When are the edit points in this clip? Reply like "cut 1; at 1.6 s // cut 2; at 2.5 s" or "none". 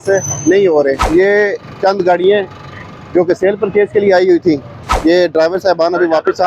cut 1; at 1.0 s